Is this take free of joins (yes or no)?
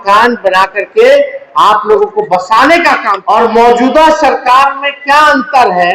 no